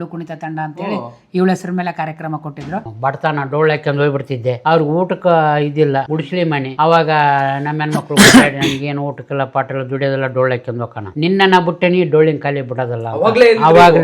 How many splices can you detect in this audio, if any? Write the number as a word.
one